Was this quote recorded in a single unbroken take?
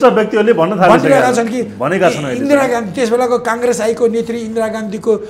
yes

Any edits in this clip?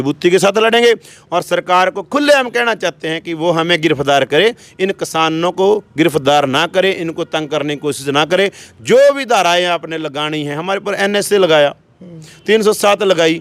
no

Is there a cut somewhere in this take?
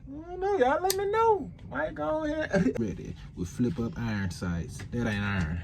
yes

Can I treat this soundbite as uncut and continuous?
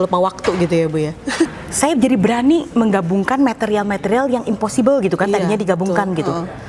no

